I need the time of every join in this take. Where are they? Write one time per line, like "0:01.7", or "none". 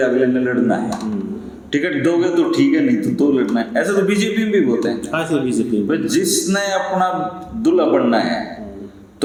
none